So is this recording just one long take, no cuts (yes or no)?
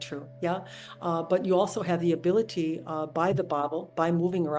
yes